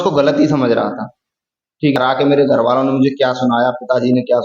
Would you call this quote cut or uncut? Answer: cut